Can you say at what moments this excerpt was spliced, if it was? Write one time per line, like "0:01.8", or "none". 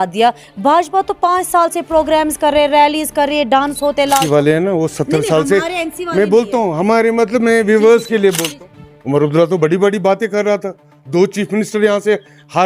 0:04.2
0:08.5